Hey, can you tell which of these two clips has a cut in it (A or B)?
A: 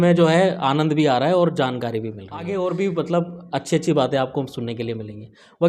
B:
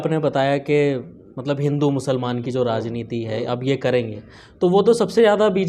A